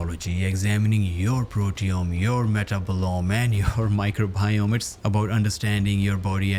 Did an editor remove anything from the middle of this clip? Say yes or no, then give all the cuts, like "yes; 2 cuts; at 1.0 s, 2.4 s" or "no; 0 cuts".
no; 0 cuts